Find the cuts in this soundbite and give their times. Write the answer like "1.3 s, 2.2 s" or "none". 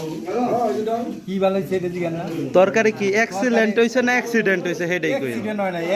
none